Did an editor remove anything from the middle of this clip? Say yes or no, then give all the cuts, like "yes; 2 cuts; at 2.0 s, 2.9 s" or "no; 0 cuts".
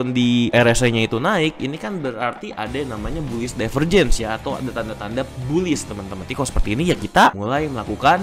no; 0 cuts